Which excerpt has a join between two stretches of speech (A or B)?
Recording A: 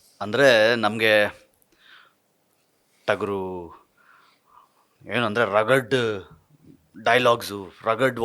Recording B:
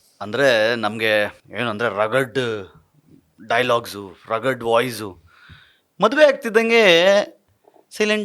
B